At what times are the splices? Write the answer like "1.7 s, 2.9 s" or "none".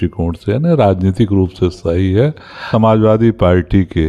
2.7 s